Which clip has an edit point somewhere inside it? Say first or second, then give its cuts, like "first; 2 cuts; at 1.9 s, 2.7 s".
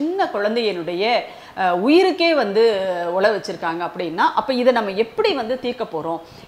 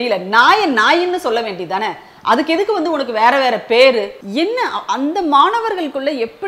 second; 1 cut; at 4.2 s